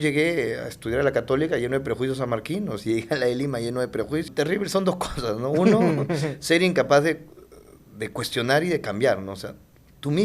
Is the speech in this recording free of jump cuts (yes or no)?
no